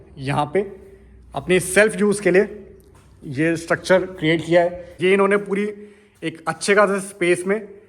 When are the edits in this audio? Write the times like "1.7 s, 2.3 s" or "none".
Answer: 4.9 s